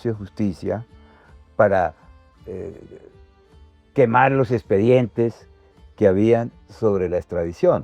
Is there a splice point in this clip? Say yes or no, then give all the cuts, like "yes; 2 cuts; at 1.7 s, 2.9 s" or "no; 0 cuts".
no; 0 cuts